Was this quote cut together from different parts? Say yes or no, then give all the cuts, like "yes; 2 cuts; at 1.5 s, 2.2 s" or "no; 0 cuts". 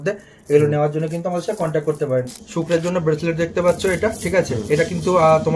yes; 1 cut; at 2.3 s